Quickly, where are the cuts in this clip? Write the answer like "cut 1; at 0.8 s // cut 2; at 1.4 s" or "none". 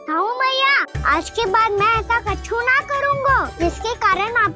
cut 1; at 0.9 s // cut 2; at 3.5 s